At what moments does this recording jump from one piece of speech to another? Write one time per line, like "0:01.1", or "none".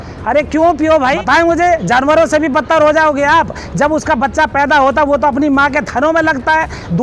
0:01.2